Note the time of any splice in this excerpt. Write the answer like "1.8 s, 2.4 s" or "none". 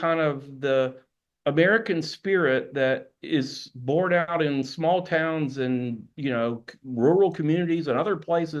none